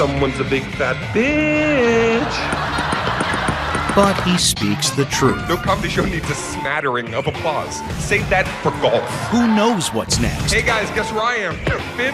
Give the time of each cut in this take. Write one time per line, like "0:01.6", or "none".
none